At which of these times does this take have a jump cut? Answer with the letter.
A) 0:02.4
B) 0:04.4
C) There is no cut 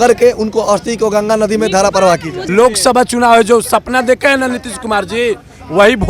A